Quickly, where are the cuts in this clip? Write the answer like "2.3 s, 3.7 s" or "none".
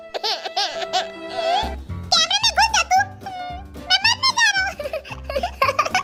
none